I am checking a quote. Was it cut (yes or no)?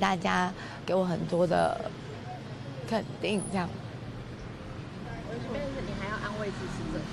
no